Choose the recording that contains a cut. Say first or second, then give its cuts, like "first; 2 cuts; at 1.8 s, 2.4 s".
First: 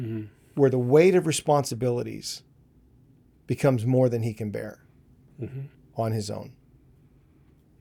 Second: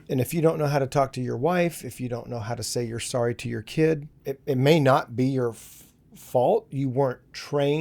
second; 1 cut; at 4.1 s